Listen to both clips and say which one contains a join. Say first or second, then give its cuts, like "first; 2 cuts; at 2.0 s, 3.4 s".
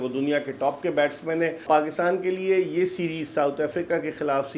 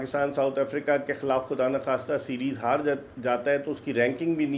first; 1 cut; at 1.6 s